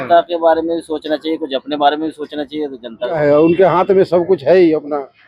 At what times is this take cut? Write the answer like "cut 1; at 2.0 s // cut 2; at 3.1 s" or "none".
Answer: cut 1; at 3.2 s